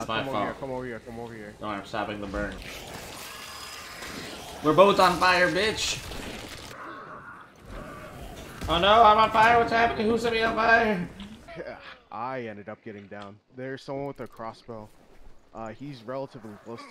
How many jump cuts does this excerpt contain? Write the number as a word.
three